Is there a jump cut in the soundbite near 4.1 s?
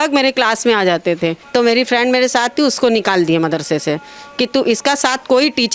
no; 1 cut; at 1.4 s

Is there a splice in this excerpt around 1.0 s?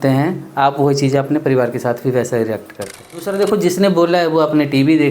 no; 1 cut; at 3.3 s

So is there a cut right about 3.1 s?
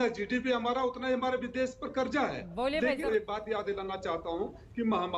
yes; 1 cut; at 3.1 s

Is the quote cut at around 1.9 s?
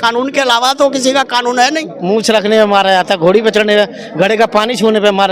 yes; 1 cut; at 1.9 s

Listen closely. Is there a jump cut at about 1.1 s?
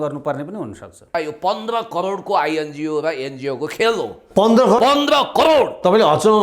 yes; 1 cut; at 1.1 s

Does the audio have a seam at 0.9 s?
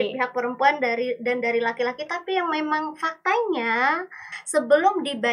no; 1 cut; at 4.3 s

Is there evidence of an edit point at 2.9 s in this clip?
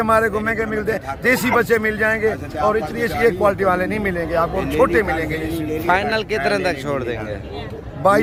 no; 0 cuts

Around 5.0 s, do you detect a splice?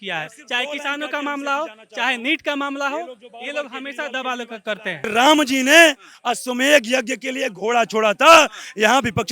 yes; 1 cut; at 5.0 s

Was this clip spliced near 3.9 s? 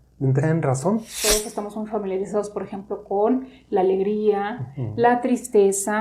no; 1 cut; at 1.1 s

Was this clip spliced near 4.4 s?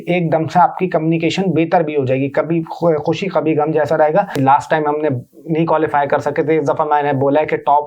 yes; 1 cut; at 4.4 s

